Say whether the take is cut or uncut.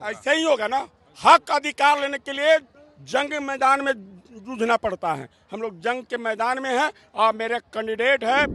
uncut